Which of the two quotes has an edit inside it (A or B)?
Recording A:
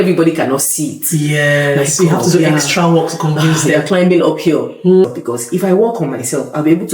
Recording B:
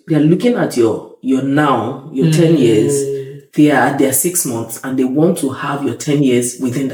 A